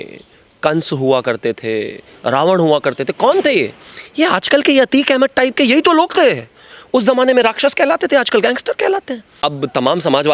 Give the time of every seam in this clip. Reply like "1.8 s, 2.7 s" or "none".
9.3 s